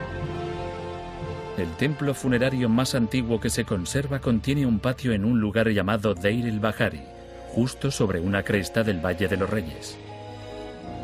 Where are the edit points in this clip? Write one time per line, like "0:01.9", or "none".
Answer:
0:09.6